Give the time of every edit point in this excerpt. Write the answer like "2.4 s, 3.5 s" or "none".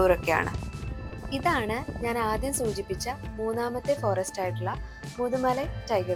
none